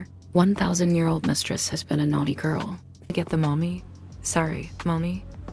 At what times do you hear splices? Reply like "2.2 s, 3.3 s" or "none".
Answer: 3.1 s